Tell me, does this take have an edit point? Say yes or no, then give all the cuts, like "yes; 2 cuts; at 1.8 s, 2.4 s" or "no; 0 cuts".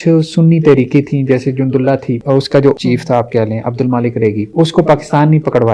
yes; 2 cuts; at 2.5 s, 4.4 s